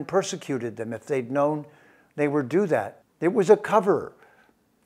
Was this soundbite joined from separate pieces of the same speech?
yes; 1 cut; at 3.0 s

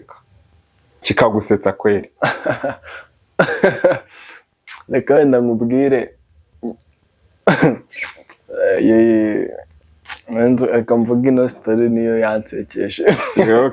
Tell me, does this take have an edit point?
no; 0 cuts

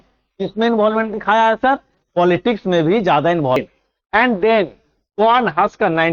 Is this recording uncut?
no; 1 cut; at 3.6 s

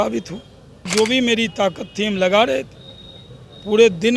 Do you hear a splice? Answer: yes; 1 cut; at 0.9 s

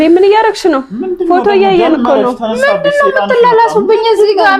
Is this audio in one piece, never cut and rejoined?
yes; 0 cuts

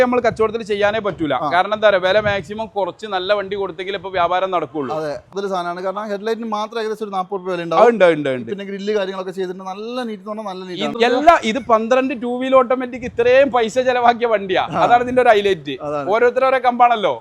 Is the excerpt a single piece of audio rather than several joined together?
no; 2 cuts; at 5.3 s, 10.9 s

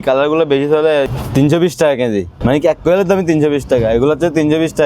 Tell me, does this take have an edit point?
yes; 2 cuts; at 1.2 s, 2.3 s

